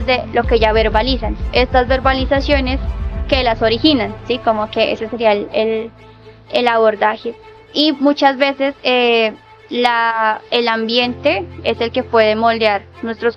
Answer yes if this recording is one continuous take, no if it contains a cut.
yes